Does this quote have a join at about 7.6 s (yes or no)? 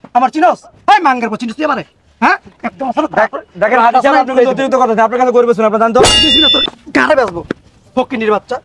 no